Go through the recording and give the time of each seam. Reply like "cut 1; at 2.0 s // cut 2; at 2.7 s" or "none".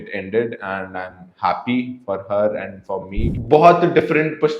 cut 1; at 3.3 s

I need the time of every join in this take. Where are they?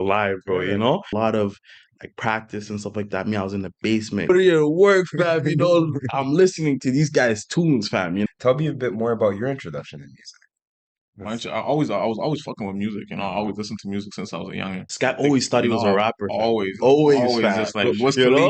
cut 1; at 1.1 s // cut 2; at 4.3 s // cut 3; at 8.3 s // cut 4; at 14.9 s

